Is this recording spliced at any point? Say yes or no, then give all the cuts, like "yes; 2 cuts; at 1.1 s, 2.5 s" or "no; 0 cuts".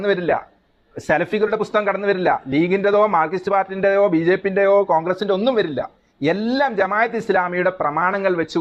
no; 0 cuts